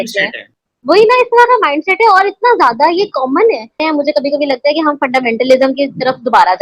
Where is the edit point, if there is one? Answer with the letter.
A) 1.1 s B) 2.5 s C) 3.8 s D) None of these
C